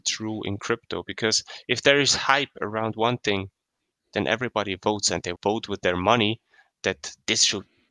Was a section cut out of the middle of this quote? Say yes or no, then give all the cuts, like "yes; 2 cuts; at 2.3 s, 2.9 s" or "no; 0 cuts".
no; 0 cuts